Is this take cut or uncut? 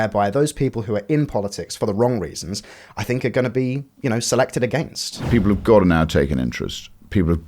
cut